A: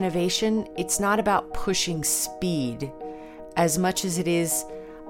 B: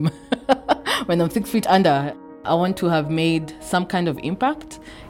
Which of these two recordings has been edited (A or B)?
B